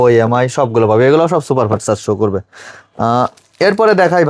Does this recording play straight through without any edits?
yes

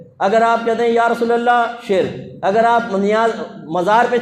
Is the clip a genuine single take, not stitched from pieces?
yes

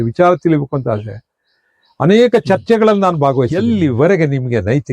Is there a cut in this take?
yes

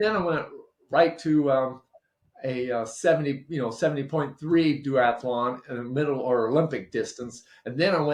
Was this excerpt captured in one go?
yes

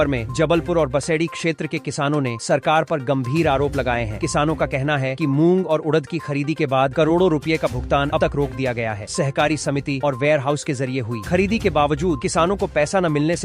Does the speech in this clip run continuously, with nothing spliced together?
yes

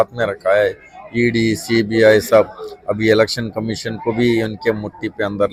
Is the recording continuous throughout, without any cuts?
yes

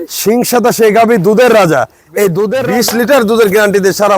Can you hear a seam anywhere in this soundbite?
yes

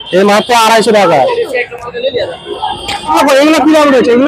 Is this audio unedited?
no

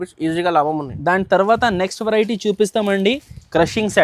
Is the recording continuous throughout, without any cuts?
yes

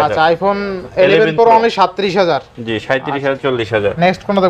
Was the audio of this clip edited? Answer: no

